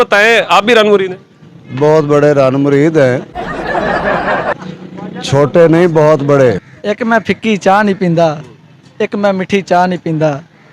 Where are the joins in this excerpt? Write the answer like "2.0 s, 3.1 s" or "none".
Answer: 6.7 s